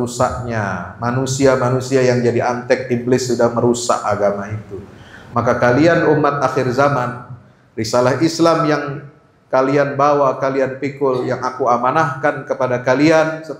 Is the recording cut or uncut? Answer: uncut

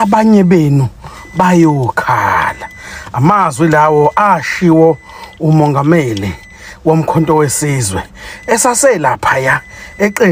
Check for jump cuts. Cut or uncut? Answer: uncut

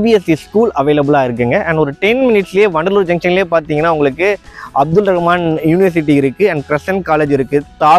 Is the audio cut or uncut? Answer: uncut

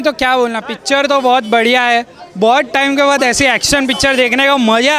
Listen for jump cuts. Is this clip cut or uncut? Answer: uncut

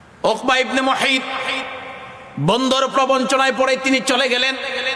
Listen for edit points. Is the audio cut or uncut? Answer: cut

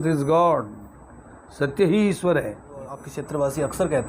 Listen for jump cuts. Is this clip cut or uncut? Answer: cut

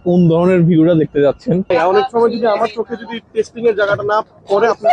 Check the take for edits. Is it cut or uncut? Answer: cut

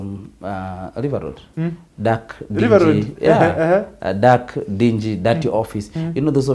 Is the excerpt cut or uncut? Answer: uncut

